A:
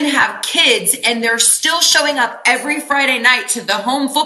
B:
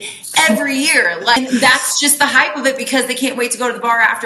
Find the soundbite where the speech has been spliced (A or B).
B